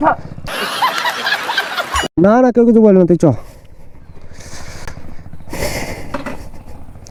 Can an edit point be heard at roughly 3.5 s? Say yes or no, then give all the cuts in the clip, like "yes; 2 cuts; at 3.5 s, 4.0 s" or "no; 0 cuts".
no; 0 cuts